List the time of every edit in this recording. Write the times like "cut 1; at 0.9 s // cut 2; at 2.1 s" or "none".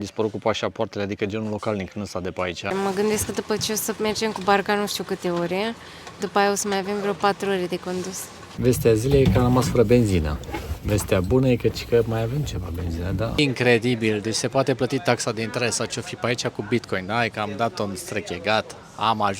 cut 1; at 2.7 s // cut 2; at 8.5 s // cut 3; at 13.4 s